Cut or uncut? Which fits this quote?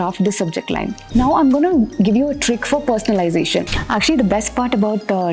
cut